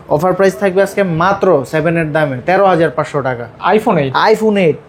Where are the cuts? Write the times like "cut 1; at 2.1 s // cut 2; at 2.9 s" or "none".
none